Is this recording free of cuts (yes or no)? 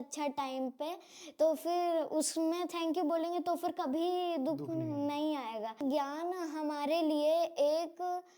no